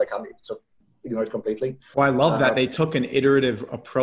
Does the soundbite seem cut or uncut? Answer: cut